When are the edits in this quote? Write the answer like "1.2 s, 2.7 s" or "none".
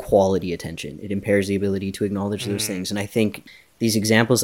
3.4 s